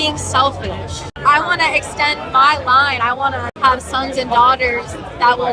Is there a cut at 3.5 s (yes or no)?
yes